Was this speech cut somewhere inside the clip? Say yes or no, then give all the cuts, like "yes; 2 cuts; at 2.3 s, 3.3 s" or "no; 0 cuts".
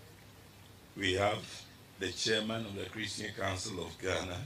no; 0 cuts